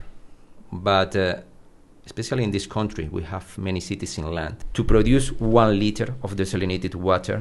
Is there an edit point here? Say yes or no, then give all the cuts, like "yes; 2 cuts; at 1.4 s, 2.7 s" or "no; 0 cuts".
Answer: yes; 1 cut; at 4.6 s